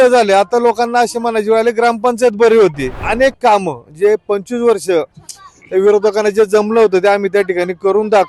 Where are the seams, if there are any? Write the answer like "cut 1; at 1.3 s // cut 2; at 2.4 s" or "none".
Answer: cut 1; at 3.0 s